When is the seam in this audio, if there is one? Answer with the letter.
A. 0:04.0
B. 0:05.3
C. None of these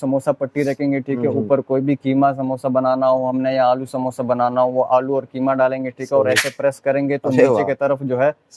C